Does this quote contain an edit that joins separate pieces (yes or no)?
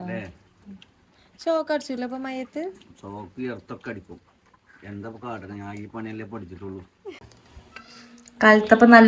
yes